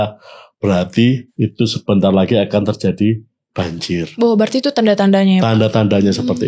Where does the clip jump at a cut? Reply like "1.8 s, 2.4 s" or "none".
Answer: 1.3 s